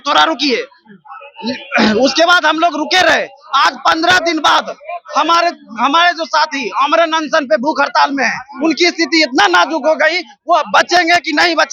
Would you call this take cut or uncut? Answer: uncut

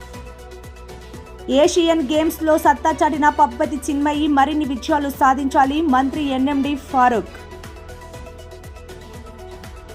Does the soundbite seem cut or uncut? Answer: cut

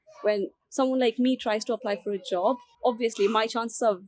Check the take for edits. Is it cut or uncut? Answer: uncut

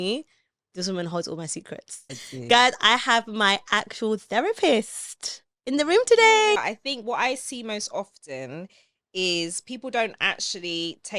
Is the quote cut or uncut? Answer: cut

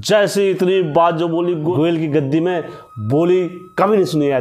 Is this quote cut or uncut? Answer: cut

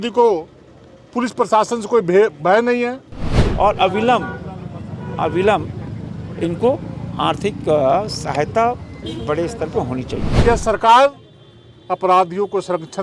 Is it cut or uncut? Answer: cut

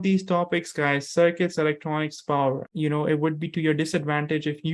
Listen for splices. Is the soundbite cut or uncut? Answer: cut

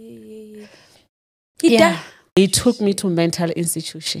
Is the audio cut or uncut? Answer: cut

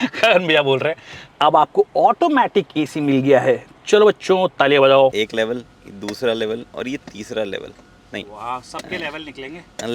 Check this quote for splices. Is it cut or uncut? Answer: cut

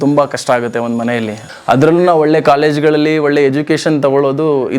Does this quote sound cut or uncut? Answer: cut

